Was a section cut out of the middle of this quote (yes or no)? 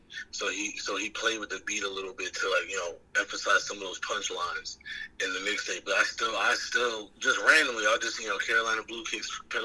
yes